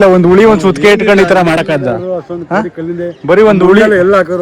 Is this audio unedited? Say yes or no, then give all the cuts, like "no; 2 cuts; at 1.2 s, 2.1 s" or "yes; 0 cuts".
yes; 0 cuts